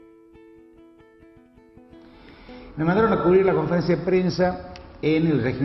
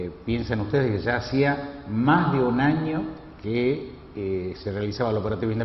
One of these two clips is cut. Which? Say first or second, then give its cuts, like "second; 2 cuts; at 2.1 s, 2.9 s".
second; 1 cut; at 1.8 s